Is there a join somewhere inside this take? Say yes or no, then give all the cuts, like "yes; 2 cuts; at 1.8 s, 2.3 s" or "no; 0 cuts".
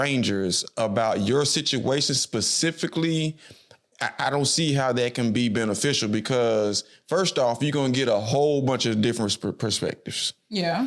no; 0 cuts